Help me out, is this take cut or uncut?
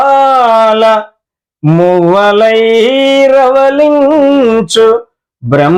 uncut